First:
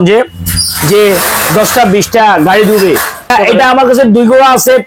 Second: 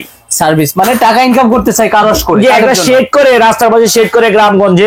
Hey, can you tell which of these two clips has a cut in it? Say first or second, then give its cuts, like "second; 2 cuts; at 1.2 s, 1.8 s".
first; 1 cut; at 3.3 s